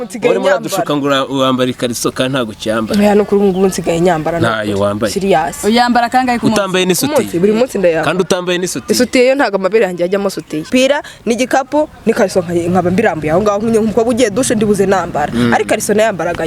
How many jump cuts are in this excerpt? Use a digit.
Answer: 1